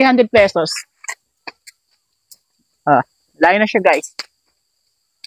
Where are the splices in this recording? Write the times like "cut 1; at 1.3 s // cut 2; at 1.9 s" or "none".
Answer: none